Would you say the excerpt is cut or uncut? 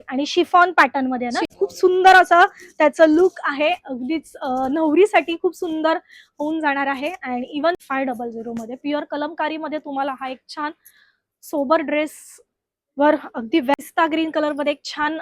cut